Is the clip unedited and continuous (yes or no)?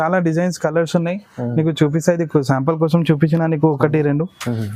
yes